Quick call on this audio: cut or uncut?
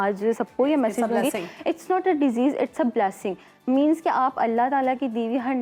uncut